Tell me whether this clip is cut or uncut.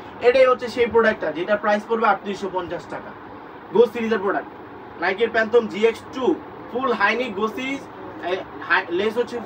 uncut